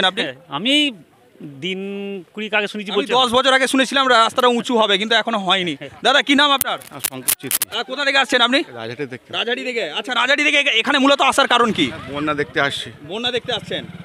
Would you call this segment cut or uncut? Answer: uncut